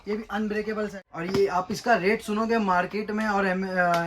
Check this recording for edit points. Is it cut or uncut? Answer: cut